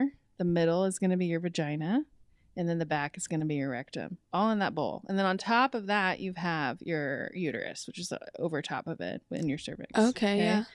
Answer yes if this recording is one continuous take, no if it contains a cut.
yes